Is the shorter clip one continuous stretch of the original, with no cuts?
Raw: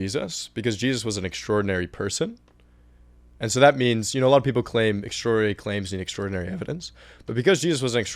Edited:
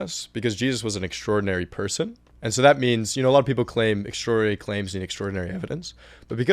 no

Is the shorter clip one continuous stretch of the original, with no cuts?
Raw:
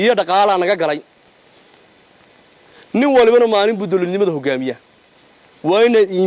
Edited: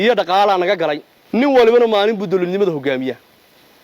no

